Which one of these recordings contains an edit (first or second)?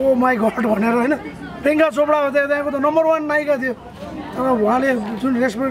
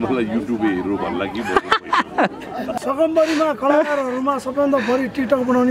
second